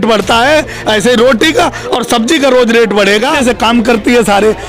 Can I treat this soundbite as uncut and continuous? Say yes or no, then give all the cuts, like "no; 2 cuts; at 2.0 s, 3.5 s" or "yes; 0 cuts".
no; 1 cut; at 3.4 s